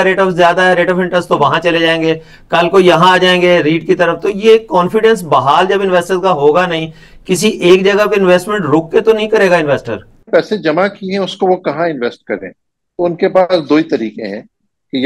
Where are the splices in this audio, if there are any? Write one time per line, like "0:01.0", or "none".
0:10.2